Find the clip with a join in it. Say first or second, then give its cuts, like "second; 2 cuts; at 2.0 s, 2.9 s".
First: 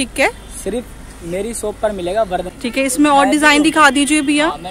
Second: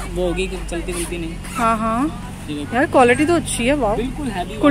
first; 1 cut; at 2.5 s